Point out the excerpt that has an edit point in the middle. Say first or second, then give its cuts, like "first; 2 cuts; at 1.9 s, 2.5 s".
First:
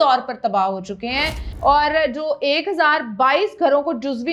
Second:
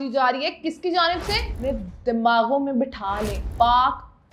second; 2 cuts; at 1.4 s, 3.4 s